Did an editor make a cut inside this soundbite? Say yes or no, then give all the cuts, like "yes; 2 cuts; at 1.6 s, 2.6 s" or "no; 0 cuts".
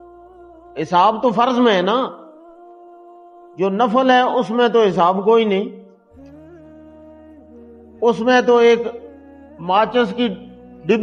no; 0 cuts